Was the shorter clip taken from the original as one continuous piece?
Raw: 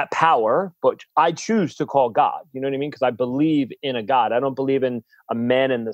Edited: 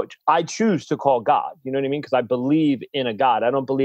yes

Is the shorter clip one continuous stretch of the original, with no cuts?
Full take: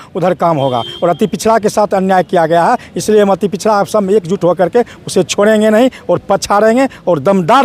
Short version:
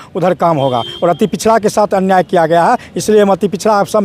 yes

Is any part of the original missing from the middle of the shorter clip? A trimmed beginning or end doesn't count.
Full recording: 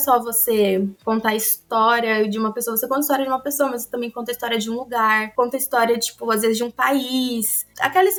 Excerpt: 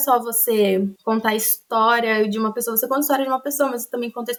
no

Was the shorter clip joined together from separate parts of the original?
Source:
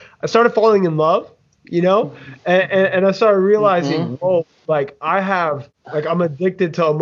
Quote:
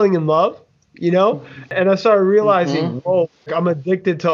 yes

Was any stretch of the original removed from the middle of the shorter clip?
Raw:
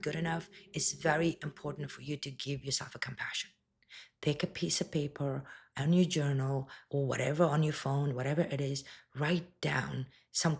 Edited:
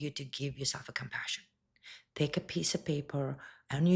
no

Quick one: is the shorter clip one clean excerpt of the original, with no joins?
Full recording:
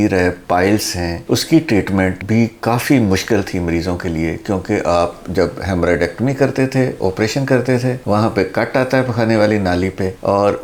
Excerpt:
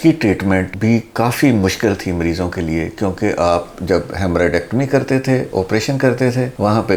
yes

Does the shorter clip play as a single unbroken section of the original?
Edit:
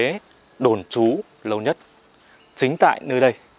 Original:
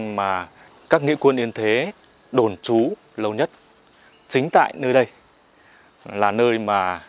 yes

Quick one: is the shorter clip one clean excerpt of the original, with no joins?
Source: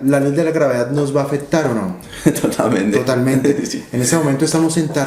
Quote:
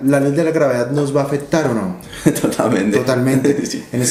yes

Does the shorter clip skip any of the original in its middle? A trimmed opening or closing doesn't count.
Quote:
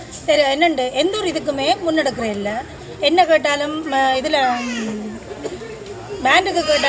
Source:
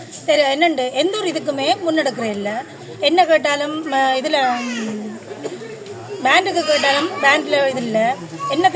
no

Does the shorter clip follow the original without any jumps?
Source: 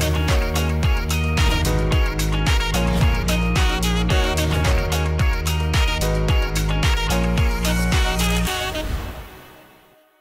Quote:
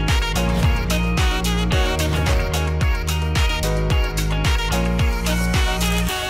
yes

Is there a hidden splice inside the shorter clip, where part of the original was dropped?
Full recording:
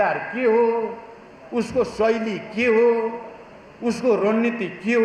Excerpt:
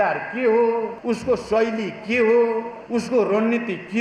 yes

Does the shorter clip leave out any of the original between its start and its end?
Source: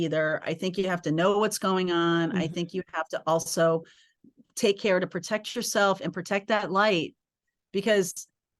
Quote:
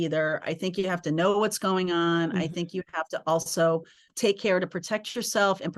yes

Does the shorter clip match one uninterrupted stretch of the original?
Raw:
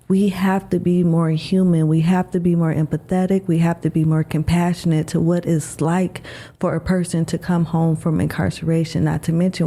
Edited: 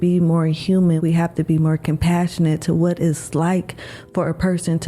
no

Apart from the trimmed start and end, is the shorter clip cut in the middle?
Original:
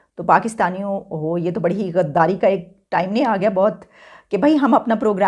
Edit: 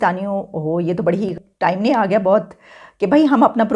yes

